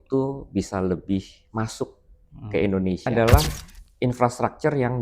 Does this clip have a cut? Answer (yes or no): yes